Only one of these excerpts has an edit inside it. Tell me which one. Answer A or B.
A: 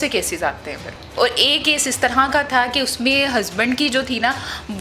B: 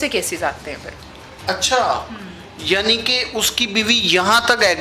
A